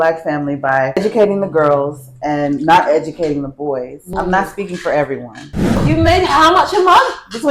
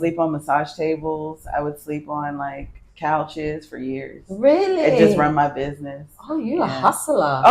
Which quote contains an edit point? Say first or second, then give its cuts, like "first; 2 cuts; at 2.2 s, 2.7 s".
first; 3 cuts; at 1.0 s, 4.0 s, 5.8 s